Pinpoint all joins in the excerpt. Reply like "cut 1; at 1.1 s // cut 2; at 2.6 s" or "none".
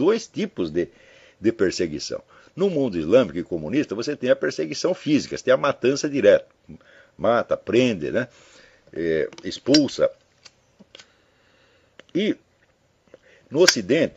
cut 1; at 12.1 s